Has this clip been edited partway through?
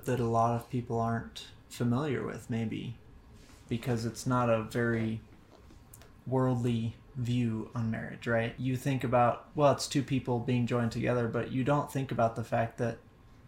yes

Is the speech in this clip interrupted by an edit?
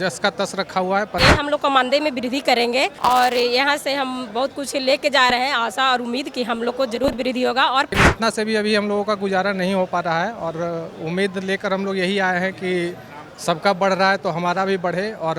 yes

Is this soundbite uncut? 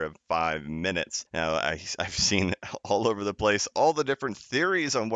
no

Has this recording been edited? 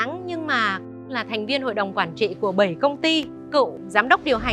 yes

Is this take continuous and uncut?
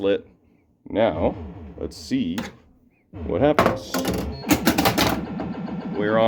yes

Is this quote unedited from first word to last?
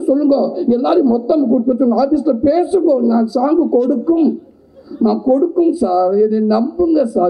yes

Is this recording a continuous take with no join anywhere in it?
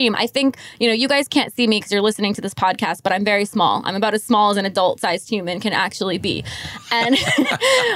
yes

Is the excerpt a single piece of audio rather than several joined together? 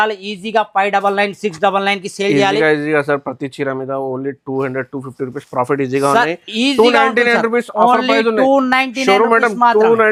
yes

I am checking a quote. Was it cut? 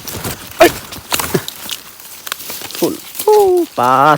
yes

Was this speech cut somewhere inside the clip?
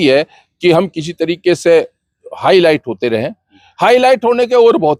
no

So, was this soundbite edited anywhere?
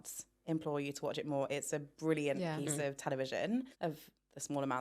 yes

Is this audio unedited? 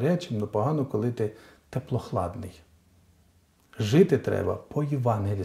yes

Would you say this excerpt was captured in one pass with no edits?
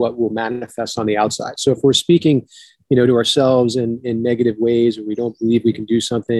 yes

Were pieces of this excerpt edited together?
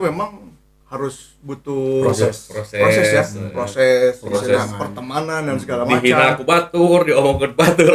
no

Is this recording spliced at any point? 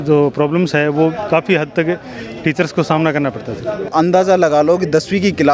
yes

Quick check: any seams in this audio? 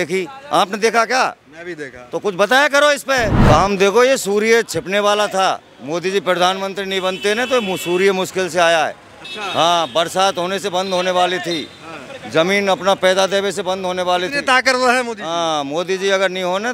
yes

